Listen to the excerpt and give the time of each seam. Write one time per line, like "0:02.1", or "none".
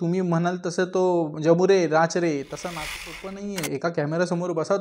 0:02.9